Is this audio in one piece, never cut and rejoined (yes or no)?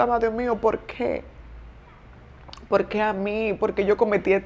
yes